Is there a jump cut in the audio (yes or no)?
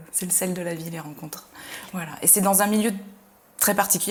no